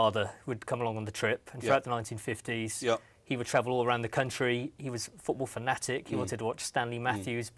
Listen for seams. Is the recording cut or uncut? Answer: uncut